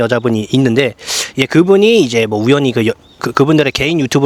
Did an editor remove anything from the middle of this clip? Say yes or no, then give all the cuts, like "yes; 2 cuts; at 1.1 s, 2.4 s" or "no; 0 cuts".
no; 0 cuts